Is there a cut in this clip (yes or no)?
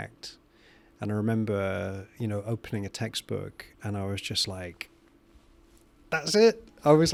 no